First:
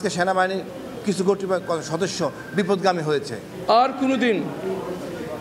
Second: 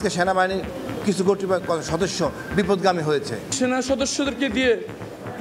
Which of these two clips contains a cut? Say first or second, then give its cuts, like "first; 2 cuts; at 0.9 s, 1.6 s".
second; 1 cut; at 3.5 s